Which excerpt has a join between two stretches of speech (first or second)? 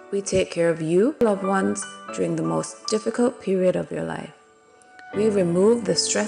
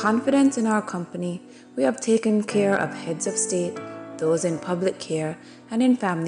first